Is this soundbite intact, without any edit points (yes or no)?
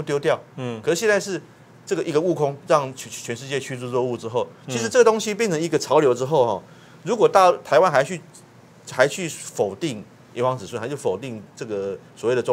yes